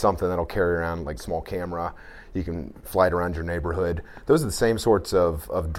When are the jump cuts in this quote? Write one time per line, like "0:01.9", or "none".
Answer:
0:01.2